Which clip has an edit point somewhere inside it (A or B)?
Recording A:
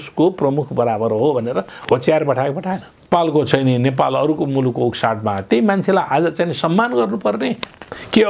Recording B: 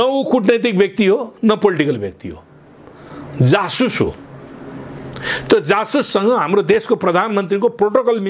A